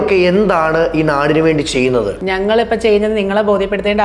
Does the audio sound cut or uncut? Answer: cut